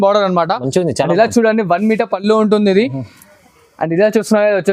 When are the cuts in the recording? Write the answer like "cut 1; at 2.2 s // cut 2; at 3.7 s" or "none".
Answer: none

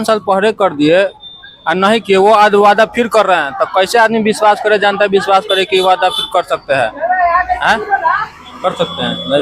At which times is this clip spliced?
none

